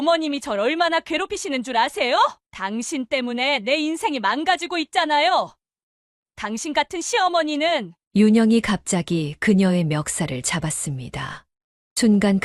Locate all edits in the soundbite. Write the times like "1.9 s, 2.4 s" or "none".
2.4 s